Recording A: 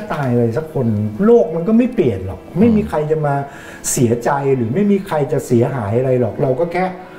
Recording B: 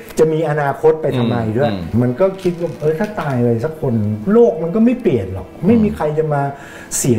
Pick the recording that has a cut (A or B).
B